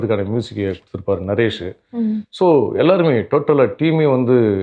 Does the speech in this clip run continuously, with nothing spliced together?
yes; 0 cuts

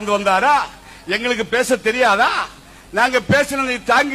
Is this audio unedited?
yes; 0 cuts

